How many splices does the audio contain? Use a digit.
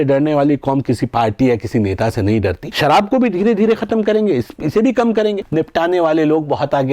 2